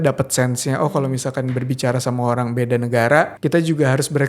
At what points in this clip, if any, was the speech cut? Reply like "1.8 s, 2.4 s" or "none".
3.3 s

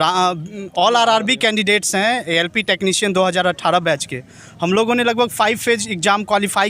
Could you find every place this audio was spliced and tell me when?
none

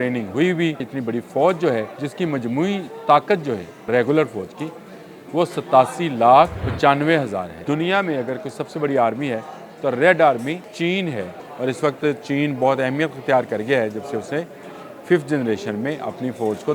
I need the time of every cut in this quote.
0.9 s, 2.0 s, 3.9 s, 6.6 s, 7.5 s, 10.7 s, 11.4 s

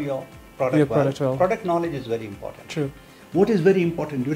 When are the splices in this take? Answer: 3.2 s

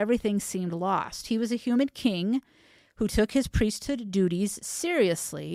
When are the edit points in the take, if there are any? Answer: none

